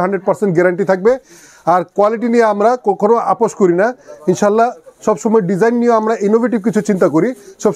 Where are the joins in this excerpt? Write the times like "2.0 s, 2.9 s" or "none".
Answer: none